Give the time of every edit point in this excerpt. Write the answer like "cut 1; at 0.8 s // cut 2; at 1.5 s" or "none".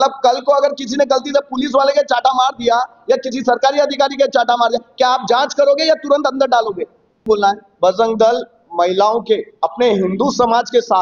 none